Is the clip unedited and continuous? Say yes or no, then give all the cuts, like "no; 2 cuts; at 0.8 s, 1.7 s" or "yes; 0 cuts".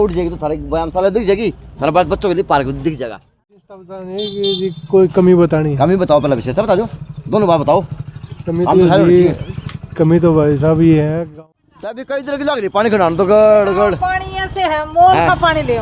no; 2 cuts; at 3.2 s, 11.2 s